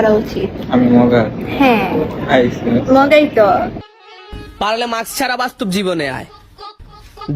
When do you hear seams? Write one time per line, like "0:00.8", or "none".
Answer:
0:03.9